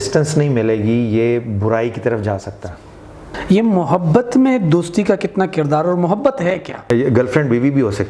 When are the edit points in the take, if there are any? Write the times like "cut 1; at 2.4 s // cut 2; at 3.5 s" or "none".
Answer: cut 1; at 3.4 s // cut 2; at 6.9 s